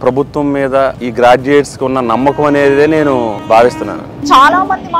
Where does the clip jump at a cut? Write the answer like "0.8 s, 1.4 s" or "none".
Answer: 1.0 s, 3.4 s, 4.2 s